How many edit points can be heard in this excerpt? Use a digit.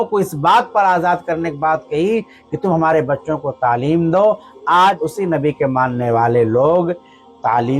1